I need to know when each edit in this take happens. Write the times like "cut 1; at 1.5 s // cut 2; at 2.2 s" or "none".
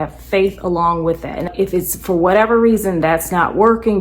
cut 1; at 1.5 s

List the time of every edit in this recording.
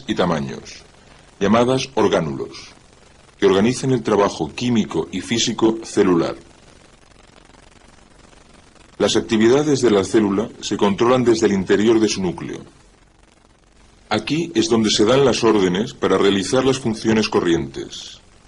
cut 1; at 15.1 s

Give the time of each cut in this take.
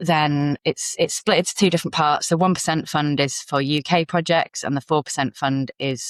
none

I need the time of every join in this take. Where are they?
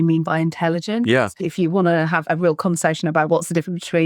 cut 1; at 1.3 s

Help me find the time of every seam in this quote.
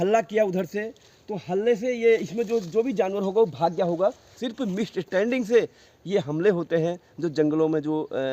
cut 1; at 4.4 s

